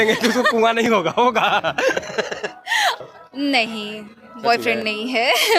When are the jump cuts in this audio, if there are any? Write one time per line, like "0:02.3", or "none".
0:03.0